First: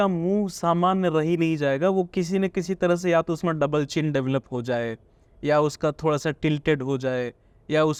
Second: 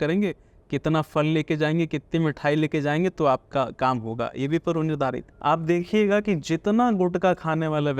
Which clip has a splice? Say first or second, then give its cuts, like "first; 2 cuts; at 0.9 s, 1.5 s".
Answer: second; 1 cut; at 5.3 s